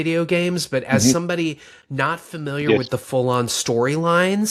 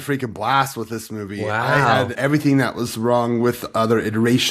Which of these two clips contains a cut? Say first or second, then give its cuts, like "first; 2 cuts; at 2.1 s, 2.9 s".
second; 1 cut; at 2.2 s